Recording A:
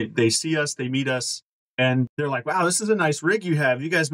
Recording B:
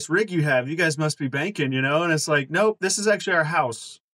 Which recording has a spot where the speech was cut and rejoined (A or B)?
A